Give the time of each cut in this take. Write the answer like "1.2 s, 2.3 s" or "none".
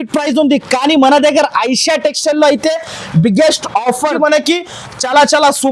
4.1 s